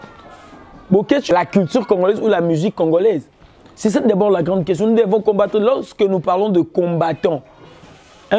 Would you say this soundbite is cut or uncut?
cut